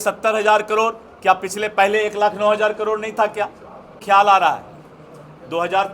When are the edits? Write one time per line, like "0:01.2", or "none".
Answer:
0:03.9